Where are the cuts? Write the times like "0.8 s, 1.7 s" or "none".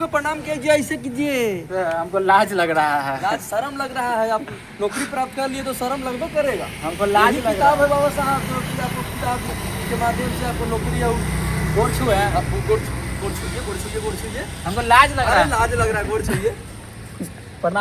none